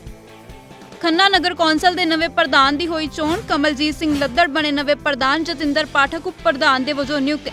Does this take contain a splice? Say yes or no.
yes